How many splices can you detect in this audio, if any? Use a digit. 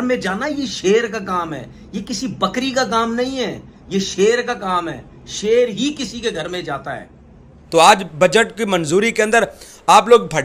1